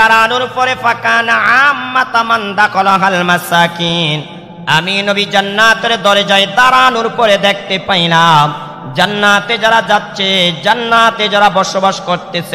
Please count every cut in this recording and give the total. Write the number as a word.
zero